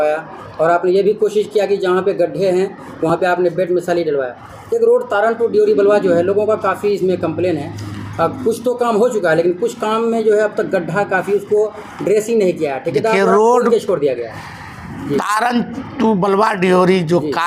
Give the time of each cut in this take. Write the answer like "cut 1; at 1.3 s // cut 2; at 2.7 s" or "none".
none

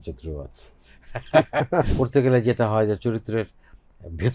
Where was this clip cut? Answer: cut 1; at 1.9 s

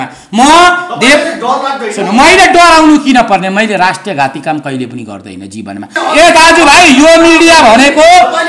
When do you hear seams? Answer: cut 1; at 5.9 s

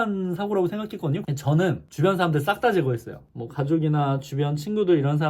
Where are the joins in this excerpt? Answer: cut 1; at 1.2 s

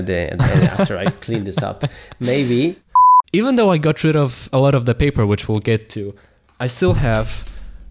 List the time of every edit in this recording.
cut 1; at 3.0 s

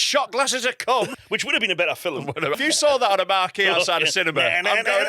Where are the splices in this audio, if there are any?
cut 1; at 1.1 s // cut 2; at 2.6 s

